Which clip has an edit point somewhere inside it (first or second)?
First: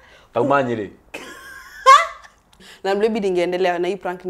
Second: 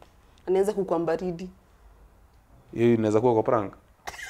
first